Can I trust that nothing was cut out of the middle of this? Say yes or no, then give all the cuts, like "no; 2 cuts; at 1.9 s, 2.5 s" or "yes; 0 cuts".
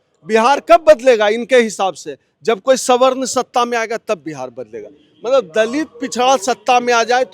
yes; 0 cuts